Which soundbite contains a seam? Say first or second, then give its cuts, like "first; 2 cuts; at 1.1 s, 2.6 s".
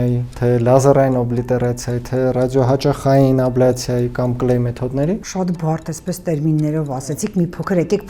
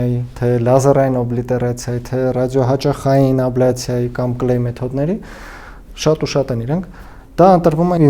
first; 1 cut; at 5.3 s